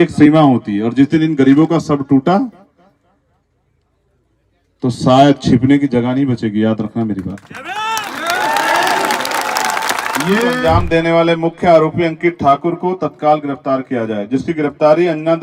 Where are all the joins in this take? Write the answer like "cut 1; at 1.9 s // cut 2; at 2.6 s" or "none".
cut 1; at 10.6 s